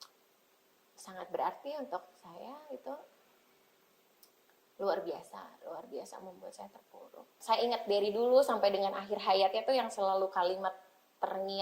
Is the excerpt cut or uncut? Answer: cut